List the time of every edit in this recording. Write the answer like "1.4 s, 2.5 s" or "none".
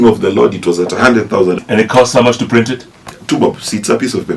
1.6 s